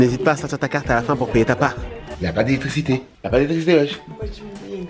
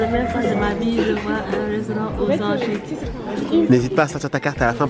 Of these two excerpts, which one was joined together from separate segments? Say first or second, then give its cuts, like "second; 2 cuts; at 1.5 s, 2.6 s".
first; 1 cut; at 2.1 s